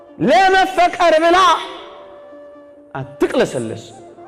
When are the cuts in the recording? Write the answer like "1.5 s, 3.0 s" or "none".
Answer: none